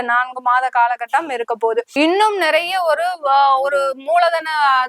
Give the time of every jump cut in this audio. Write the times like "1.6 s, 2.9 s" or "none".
1.9 s